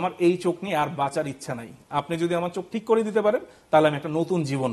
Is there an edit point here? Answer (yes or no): no